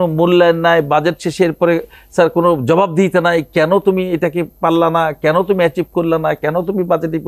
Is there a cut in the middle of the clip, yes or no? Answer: no